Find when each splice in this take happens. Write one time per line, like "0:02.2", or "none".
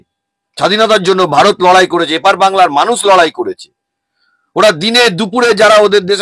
none